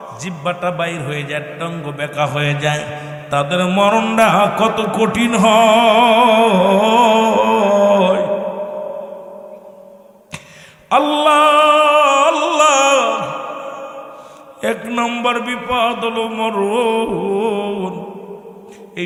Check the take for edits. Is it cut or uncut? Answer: uncut